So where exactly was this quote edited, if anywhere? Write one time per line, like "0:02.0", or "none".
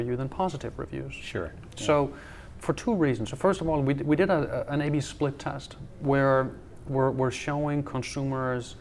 none